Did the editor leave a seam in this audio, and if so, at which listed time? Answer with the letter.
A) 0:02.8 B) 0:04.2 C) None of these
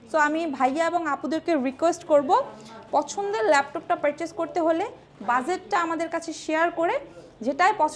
C